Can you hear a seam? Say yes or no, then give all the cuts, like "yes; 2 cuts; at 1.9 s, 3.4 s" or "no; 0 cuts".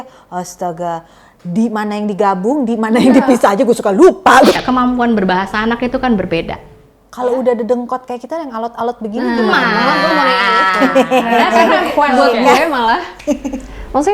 yes; 1 cut; at 4.6 s